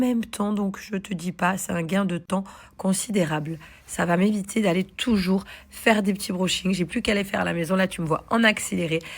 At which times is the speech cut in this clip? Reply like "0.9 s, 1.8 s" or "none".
2.3 s